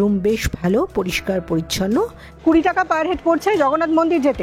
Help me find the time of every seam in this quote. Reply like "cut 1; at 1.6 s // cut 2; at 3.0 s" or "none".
cut 1; at 2.3 s